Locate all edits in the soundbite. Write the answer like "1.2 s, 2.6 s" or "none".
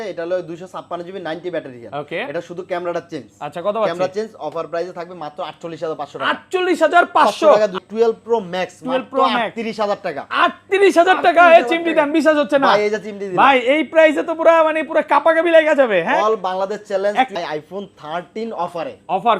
7.8 s, 17.4 s